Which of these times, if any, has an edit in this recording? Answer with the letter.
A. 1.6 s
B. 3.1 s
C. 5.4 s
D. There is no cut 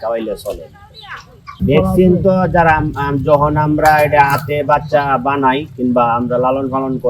A